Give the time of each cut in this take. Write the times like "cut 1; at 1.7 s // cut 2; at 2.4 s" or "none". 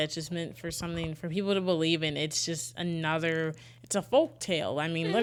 none